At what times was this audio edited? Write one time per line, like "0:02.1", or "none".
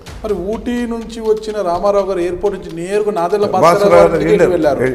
none